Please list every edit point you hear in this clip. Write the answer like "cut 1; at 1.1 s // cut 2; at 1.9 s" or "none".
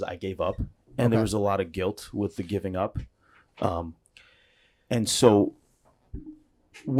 none